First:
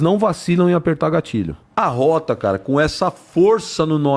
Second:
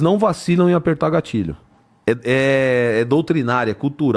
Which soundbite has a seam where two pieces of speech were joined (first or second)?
first